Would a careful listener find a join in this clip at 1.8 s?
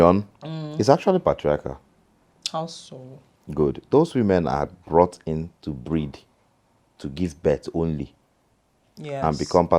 no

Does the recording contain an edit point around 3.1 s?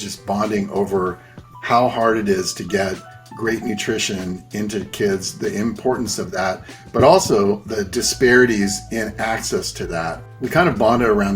no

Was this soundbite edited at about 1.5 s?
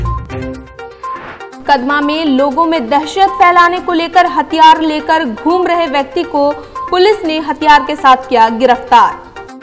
yes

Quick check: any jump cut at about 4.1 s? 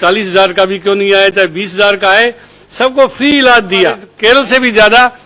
yes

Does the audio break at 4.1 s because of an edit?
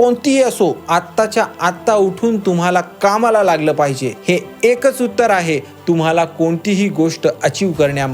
yes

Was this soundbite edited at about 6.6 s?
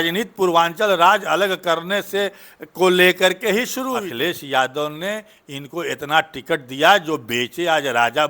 no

